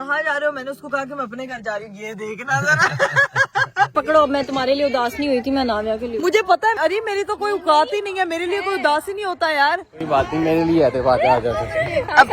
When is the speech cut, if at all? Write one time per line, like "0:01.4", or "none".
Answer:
0:03.9
0:06.8